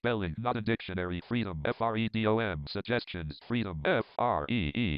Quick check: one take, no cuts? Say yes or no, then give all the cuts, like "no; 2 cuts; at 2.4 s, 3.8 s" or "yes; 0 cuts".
yes; 0 cuts